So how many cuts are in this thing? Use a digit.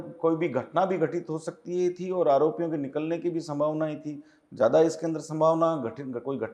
0